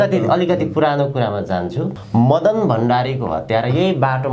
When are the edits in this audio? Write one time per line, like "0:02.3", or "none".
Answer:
0:01.9